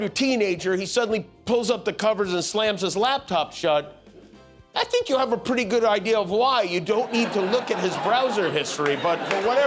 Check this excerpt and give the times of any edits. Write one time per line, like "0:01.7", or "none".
none